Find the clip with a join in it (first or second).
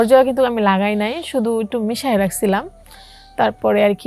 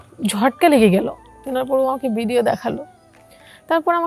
second